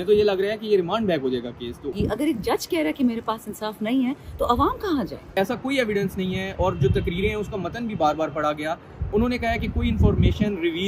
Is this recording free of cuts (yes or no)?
no